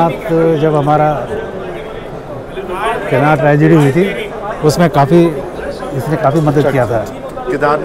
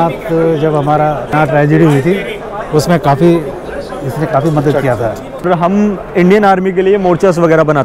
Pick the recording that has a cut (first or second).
second